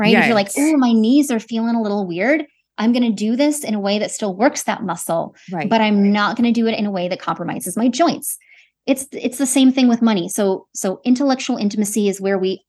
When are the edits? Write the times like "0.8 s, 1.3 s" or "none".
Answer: none